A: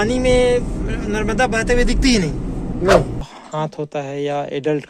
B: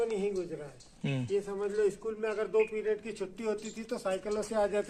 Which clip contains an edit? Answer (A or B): A